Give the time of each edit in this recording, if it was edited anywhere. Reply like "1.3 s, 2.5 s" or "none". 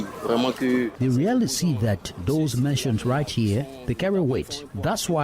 0.9 s